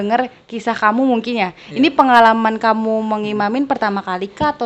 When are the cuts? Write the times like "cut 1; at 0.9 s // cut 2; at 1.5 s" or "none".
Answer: none